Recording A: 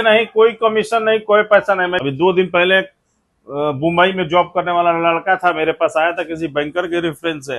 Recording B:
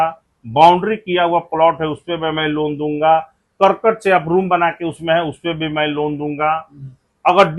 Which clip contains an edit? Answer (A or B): A